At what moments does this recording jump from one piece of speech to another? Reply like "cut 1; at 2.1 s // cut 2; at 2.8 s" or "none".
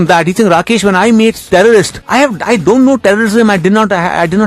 cut 1; at 1.4 s // cut 2; at 2.0 s

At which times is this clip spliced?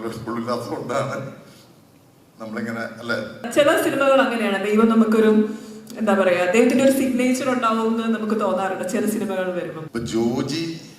cut 1; at 3.5 s // cut 2; at 9.8 s

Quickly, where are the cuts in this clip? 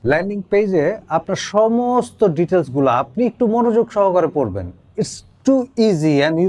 none

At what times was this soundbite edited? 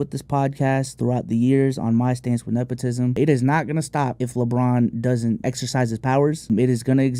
cut 1; at 3.2 s // cut 2; at 4.2 s // cut 3; at 5.4 s // cut 4; at 6.5 s

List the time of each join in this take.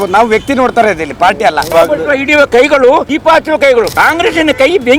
cut 1; at 1.7 s // cut 2; at 3.1 s // cut 3; at 3.9 s

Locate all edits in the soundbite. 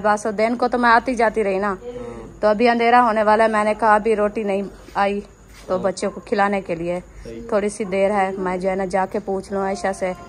none

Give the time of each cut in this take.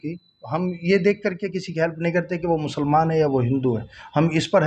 none

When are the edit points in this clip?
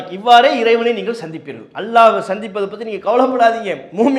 none

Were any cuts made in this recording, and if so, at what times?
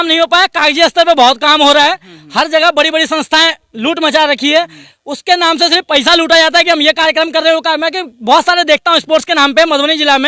none

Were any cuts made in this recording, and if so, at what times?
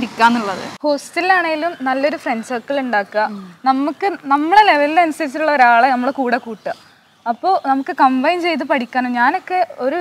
none

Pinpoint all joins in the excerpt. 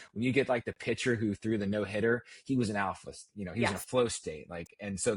none

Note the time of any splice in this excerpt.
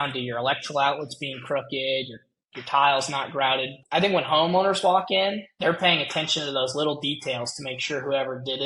cut 1; at 3.8 s

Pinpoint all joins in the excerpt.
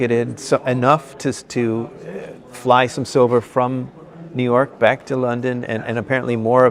none

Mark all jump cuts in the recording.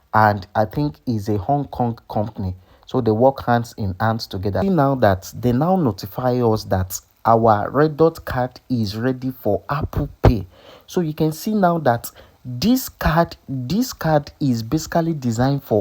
cut 1; at 4.6 s

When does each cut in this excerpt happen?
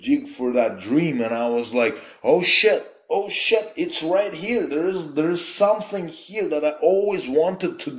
none

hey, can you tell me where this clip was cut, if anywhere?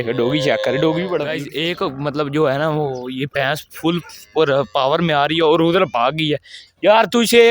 cut 1; at 1.3 s

